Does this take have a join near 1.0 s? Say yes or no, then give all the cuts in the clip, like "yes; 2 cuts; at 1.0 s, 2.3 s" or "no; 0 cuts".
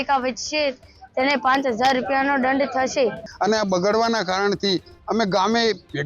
no; 1 cut; at 3.2 s